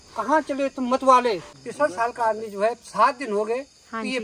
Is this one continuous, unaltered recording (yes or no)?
no